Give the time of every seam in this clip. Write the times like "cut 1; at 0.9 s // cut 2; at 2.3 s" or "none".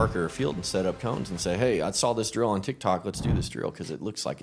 none